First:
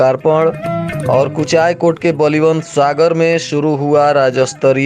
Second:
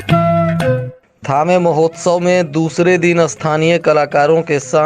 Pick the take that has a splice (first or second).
second